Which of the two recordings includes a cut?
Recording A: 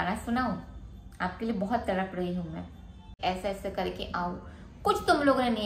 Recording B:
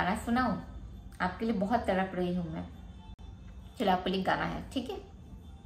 A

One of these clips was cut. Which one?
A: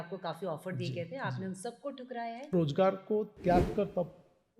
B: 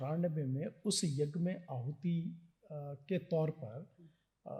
A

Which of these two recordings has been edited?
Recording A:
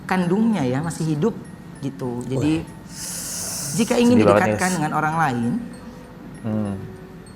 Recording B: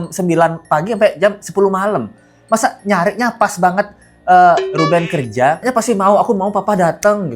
B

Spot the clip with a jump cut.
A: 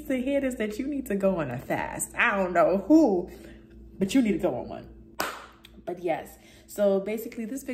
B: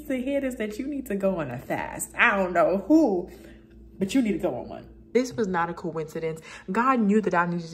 B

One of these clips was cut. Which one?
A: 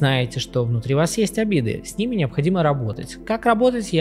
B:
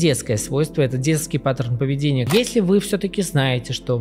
B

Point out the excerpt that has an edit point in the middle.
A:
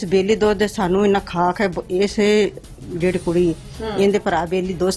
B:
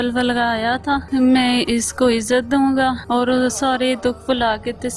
B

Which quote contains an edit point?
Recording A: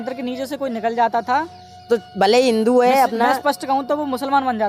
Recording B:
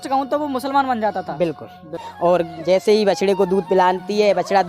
B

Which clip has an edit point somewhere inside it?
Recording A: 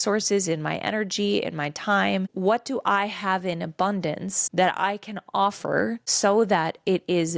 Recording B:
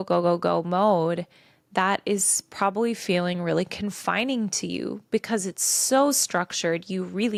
A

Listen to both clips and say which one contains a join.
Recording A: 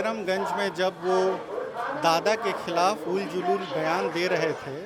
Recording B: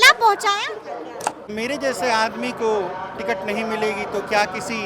B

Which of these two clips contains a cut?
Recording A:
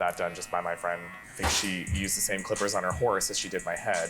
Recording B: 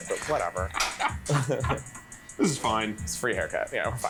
A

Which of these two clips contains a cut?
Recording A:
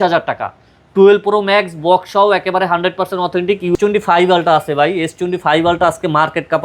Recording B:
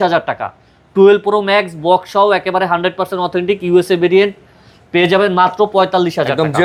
A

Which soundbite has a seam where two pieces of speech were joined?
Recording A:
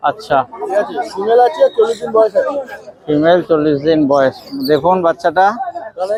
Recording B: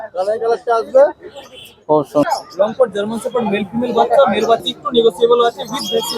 B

